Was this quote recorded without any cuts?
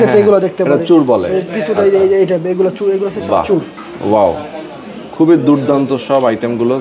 yes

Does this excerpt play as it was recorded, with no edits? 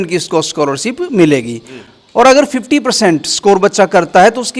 yes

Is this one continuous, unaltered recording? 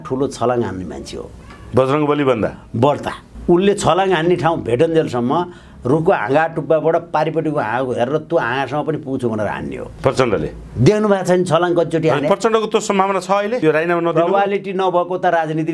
yes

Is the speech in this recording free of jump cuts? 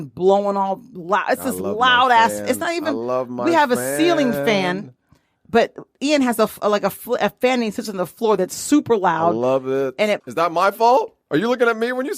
no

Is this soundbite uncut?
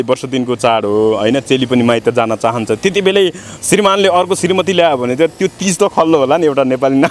yes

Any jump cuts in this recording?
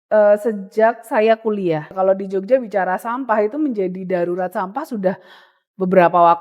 yes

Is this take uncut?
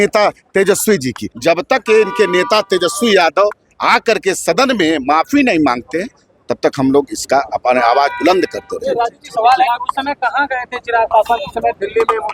no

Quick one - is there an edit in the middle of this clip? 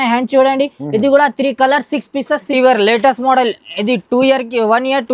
yes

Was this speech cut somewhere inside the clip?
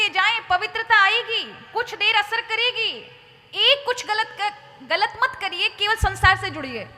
no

